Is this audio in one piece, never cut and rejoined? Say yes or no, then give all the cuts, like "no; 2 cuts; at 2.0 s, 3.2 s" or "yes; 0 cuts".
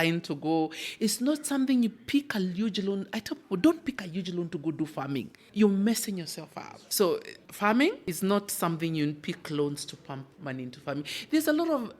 no; 4 cuts; at 5.4 s, 6.8 s, 7.4 s, 8.1 s